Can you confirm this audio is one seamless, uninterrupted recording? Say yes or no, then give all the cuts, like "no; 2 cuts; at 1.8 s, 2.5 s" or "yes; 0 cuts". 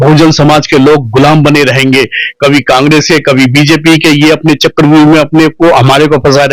yes; 0 cuts